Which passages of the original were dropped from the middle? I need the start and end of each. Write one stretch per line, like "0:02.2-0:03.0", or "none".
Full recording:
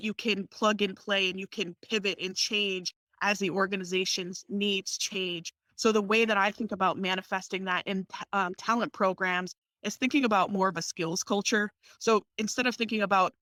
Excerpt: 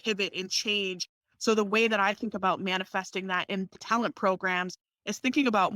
0:03.0-0:05.5
0:08.2-0:08.6